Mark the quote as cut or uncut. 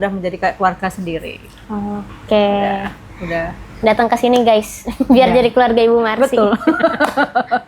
uncut